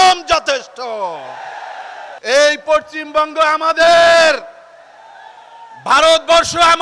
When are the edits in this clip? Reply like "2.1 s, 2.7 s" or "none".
2.1 s